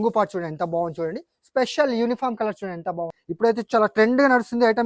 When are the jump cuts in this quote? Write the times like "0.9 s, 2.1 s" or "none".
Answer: 3.2 s